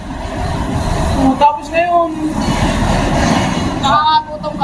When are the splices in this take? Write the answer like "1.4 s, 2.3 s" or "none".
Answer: none